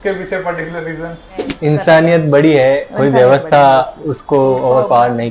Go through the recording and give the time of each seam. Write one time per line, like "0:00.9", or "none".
0:01.4